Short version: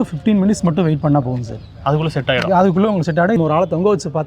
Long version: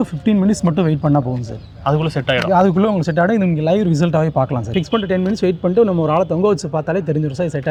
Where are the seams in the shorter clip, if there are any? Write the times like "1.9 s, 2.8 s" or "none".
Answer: 3.4 s